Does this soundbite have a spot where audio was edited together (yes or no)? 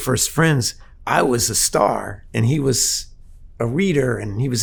no